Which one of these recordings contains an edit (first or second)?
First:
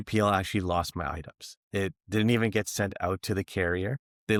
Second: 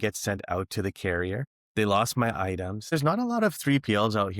second